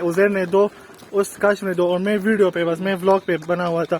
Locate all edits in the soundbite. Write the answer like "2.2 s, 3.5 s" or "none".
none